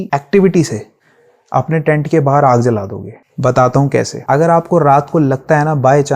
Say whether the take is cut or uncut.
cut